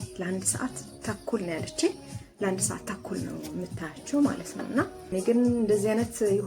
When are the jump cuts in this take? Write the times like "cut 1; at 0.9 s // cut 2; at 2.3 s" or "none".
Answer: cut 1; at 5.0 s